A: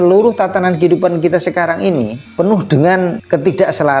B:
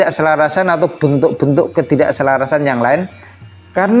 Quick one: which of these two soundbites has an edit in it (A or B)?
A